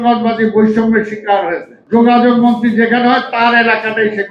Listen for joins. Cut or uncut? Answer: cut